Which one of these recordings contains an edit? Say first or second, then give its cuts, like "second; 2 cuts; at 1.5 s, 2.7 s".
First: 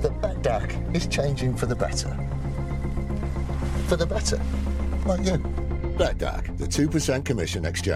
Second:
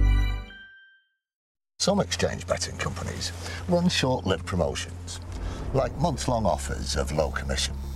second; 1 cut; at 1.5 s